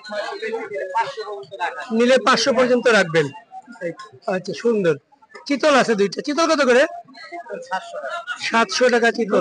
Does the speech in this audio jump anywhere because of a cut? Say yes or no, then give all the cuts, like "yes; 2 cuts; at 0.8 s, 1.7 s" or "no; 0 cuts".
no; 0 cuts